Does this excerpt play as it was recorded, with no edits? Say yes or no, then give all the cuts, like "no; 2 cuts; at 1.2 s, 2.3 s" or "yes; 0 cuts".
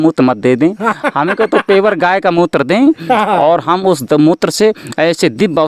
yes; 0 cuts